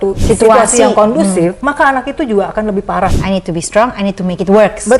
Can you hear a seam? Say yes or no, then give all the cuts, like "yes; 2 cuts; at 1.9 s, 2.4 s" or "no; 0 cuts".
yes; 2 cuts; at 1.6 s, 3.2 s